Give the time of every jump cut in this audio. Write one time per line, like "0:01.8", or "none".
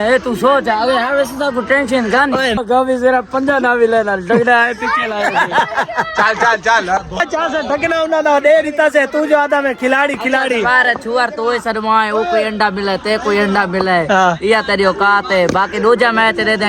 0:02.6
0:07.2